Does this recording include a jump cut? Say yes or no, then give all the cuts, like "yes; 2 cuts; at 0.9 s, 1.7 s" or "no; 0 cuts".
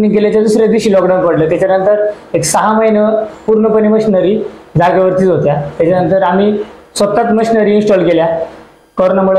no; 0 cuts